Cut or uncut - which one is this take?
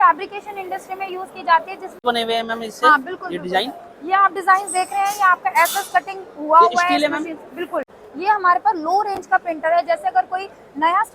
cut